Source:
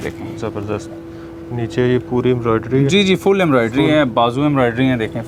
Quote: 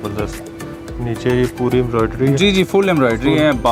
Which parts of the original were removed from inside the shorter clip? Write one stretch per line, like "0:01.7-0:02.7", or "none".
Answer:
none